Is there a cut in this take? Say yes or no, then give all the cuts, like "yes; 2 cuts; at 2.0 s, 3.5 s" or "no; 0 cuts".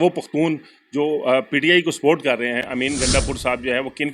yes; 1 cut; at 2.7 s